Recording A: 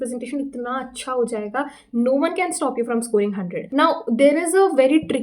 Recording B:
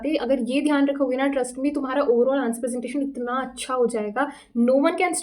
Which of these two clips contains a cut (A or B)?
A